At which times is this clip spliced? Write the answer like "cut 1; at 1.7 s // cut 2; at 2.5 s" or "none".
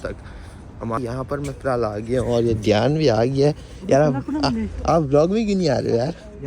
cut 1; at 1.0 s